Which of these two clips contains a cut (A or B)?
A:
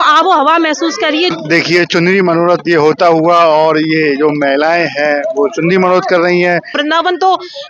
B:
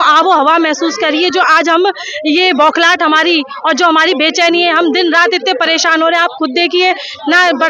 A